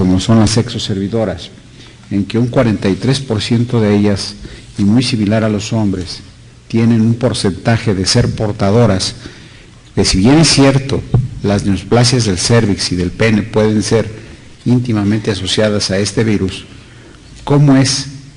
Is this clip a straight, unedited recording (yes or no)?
no